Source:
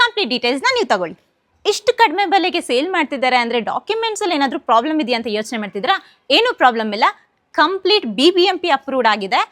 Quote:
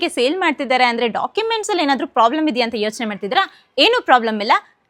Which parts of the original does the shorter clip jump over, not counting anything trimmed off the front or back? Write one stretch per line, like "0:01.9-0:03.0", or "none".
none